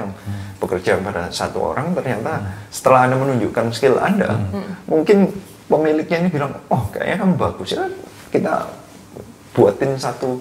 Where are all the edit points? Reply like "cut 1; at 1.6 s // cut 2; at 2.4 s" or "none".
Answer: none